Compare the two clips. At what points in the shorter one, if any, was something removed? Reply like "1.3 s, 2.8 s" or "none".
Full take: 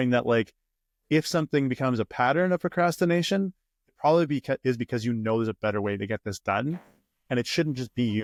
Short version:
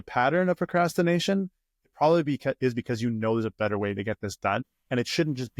4.6 s

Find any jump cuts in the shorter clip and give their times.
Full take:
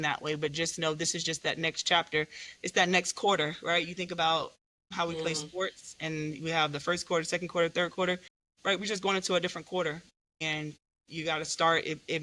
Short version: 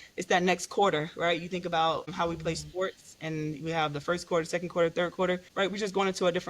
2.1 s, 5.5 s

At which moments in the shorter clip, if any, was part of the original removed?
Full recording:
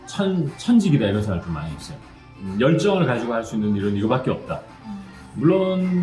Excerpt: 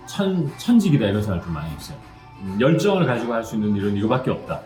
none

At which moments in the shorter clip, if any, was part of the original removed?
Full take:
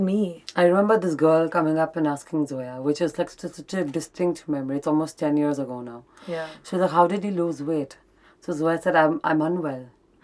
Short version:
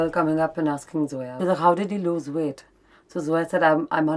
1.2 s

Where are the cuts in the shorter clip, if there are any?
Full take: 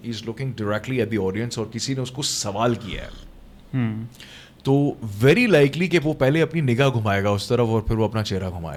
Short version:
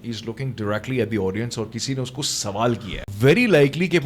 3.1 s

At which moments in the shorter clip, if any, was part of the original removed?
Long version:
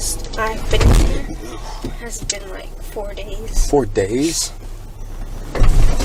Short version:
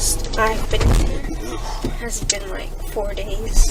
none

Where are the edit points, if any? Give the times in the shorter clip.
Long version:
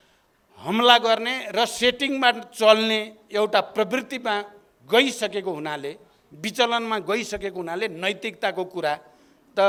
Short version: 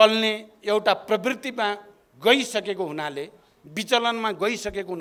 none

